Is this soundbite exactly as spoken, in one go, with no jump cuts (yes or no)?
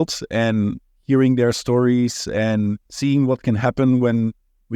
no